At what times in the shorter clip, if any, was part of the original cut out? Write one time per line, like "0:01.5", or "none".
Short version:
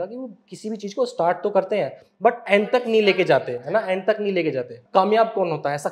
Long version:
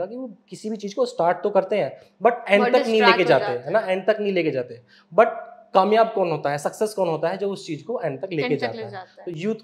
0:04.7